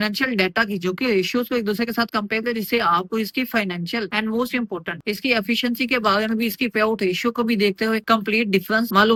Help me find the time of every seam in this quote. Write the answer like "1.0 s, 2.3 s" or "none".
none